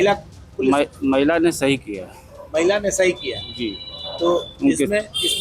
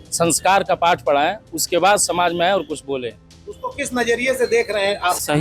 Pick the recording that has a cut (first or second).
second